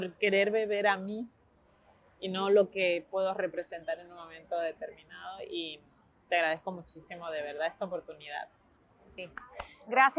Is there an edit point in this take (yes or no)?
no